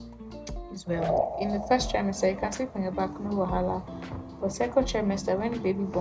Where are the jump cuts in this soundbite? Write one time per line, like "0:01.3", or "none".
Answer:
0:01.3